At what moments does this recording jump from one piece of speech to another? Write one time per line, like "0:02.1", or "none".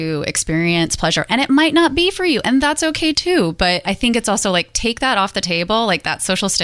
none